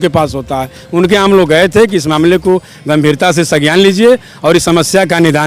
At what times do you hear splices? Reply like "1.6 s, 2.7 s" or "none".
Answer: none